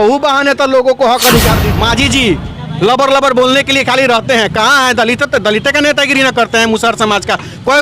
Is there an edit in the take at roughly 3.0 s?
no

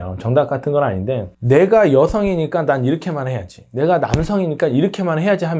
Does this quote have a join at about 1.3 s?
yes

